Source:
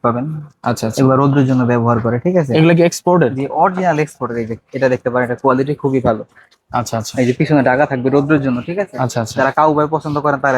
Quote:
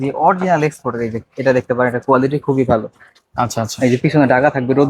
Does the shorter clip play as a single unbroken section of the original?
yes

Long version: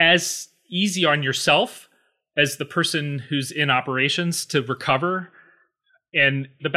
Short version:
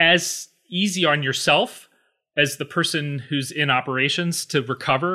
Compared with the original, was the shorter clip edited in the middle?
no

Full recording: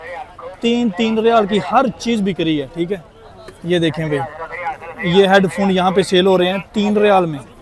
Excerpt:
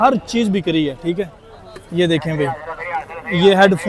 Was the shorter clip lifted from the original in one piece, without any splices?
yes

